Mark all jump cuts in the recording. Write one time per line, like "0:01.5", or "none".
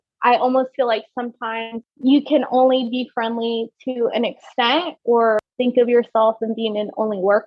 0:01.8
0:05.5